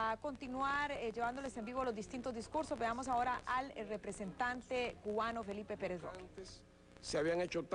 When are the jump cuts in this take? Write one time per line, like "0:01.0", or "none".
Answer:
0:02.8